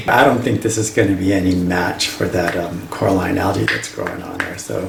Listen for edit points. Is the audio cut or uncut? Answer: uncut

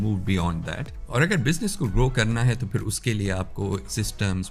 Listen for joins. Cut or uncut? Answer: cut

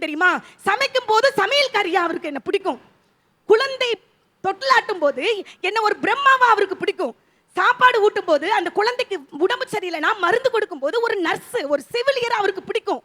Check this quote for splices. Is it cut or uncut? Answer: uncut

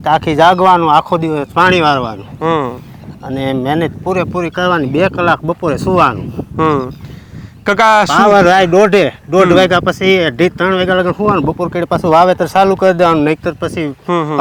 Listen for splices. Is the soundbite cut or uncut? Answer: uncut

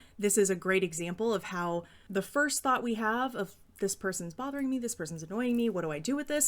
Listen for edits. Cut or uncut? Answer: cut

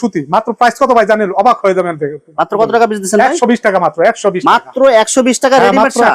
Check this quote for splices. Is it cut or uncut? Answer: uncut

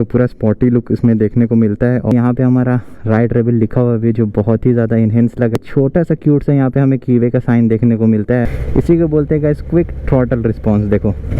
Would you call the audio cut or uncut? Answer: cut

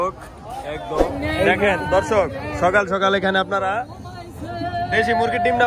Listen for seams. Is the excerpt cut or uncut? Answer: cut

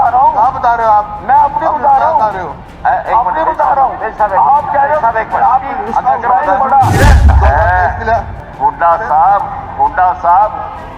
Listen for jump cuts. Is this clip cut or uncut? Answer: cut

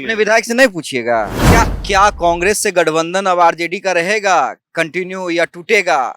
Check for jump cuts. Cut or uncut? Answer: cut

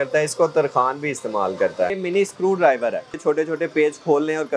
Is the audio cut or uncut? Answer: cut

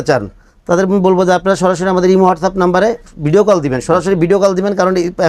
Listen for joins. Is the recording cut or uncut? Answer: uncut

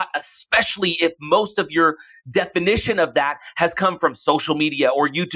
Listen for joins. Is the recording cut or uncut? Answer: uncut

